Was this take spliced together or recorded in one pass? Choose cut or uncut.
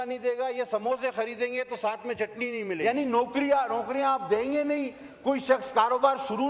cut